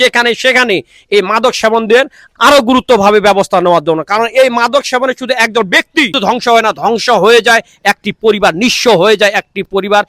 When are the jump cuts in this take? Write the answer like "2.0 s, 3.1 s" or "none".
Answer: 2.2 s, 6.2 s